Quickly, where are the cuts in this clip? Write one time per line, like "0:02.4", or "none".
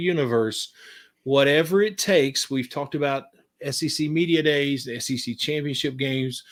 none